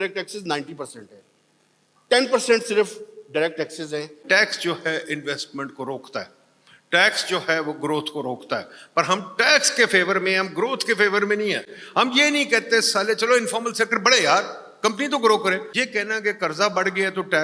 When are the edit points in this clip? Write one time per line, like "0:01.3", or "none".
0:04.2
0:15.7